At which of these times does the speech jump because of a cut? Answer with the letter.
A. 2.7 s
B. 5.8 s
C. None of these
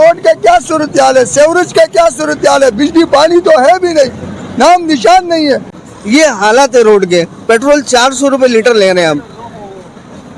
B